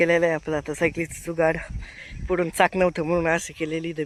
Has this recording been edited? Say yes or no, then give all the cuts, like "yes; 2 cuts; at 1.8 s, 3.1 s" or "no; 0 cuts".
no; 0 cuts